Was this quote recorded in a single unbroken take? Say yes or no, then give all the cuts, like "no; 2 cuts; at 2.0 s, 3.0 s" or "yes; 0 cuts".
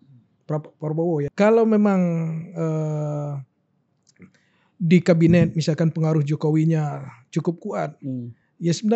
no; 1 cut; at 1.3 s